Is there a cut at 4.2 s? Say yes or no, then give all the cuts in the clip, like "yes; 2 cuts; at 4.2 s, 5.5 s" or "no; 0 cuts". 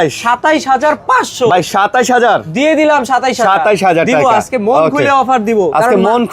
no; 0 cuts